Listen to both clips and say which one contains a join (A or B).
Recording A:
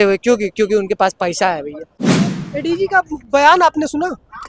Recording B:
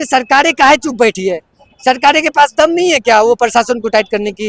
A